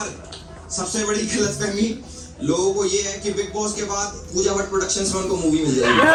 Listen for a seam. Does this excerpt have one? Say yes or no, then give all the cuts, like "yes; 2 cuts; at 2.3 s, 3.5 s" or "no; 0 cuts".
no; 0 cuts